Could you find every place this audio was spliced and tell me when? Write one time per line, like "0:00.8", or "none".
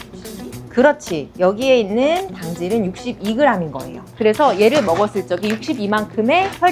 none